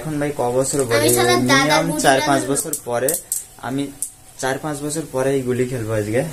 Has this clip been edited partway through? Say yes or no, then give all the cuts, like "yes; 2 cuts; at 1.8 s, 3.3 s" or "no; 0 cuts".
no; 0 cuts